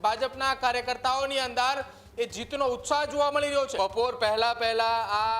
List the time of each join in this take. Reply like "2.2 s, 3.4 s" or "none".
3.7 s